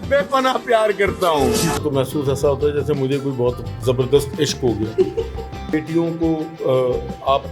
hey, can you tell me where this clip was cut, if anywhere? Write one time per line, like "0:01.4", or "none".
0:01.8
0:05.7